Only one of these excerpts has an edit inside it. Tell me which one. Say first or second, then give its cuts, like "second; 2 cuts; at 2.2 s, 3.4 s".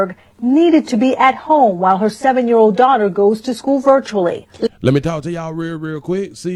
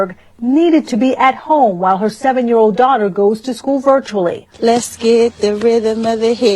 second; 1 cut; at 4.7 s